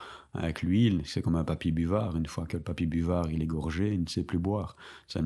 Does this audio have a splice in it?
no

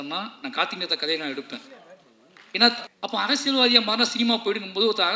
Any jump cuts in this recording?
yes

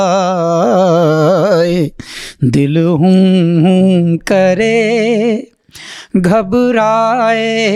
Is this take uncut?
yes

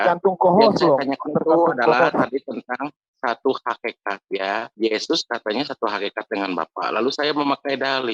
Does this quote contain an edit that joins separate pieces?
no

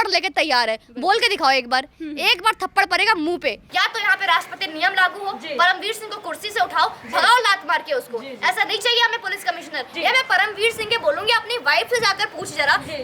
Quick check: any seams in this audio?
yes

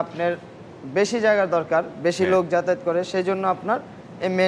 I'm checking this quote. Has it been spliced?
no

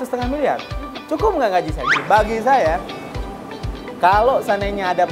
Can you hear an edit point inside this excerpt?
yes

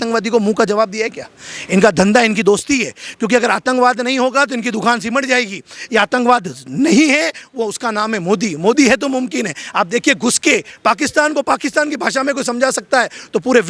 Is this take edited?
no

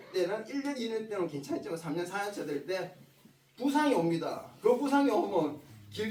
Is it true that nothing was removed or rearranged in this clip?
yes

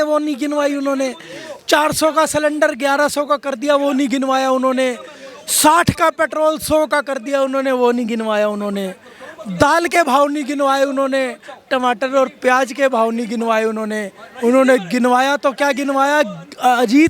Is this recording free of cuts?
yes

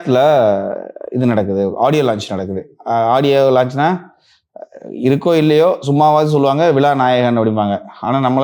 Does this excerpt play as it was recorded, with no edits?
yes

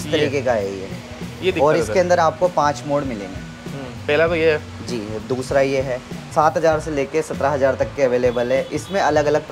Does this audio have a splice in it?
yes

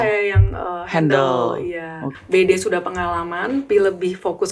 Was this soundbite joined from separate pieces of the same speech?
yes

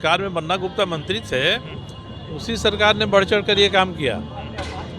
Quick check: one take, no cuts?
yes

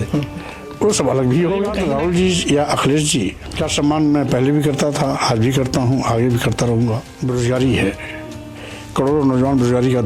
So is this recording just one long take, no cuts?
no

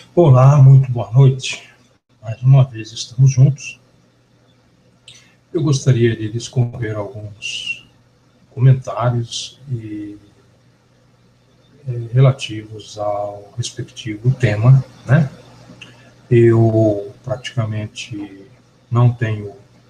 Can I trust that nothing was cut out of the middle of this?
yes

